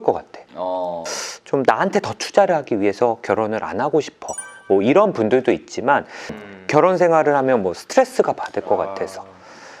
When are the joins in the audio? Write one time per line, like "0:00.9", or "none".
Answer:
0:01.0
0:06.2